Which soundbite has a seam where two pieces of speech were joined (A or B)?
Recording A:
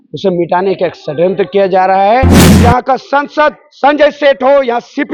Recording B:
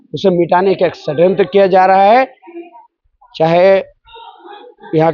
A